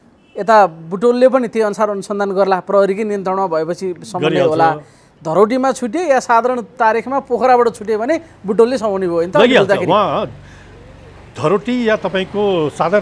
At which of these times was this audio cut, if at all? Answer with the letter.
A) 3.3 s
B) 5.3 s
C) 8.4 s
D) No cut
D